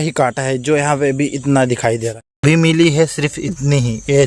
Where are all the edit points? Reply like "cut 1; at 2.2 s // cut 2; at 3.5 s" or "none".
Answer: cut 1; at 2.0 s